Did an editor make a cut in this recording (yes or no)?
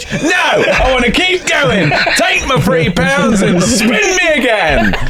no